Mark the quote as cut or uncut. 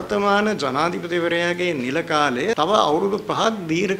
cut